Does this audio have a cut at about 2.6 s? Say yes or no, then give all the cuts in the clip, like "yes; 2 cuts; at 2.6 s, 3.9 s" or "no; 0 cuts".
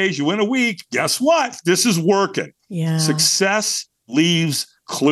yes; 1 cut; at 2.6 s